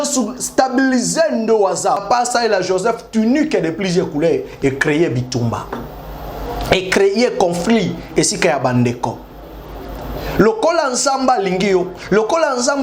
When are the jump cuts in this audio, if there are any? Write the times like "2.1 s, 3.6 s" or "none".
2.0 s